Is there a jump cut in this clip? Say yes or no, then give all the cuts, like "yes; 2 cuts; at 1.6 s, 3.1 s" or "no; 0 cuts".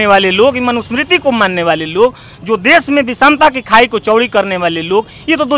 no; 0 cuts